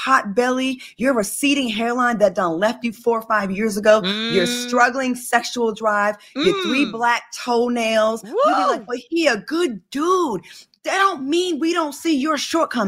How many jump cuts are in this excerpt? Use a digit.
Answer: 0